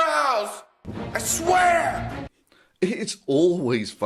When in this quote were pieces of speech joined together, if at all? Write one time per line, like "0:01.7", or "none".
none

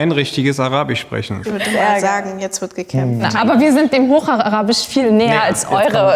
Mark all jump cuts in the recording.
0:01.4
0:03.3

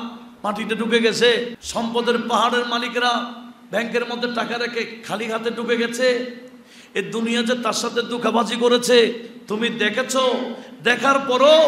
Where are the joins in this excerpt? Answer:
0:01.6

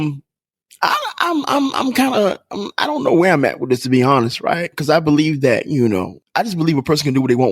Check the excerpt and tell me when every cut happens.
0:06.2

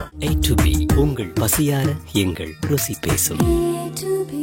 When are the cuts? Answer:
none

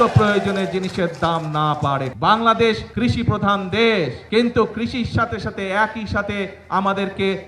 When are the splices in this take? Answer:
0:02.1
0:02.9
0:04.2

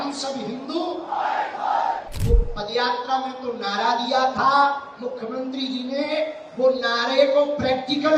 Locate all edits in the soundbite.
0:02.1

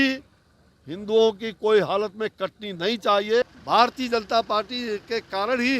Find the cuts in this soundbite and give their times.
0:03.4

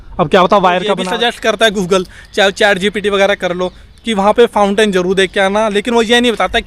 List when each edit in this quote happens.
0:01.0

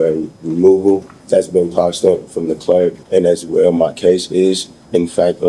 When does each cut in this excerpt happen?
0:01.1
0:03.0

